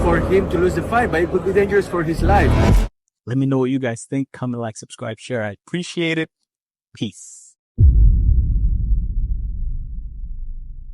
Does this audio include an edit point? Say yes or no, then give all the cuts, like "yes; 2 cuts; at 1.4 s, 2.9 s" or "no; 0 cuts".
no; 0 cuts